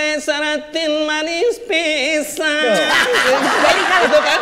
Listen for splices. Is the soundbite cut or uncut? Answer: uncut